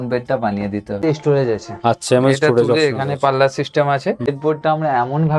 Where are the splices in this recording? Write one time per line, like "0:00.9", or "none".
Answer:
0:01.0
0:04.3